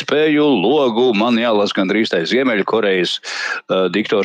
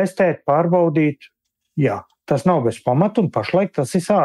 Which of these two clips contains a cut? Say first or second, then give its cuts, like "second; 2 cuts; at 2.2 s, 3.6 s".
second; 1 cut; at 1.5 s